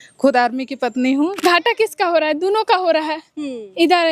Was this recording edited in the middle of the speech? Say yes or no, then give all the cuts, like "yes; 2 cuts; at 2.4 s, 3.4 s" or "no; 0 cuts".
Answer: yes; 1 cut; at 1.3 s